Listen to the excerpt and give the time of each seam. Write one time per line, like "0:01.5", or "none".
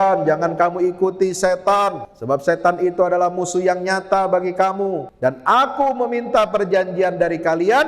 0:02.1
0:05.1